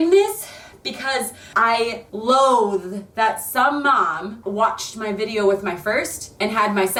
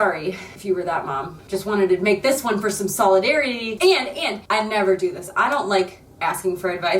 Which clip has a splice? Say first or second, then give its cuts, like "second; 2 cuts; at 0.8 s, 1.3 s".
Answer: second; 2 cuts; at 1.4 s, 3.8 s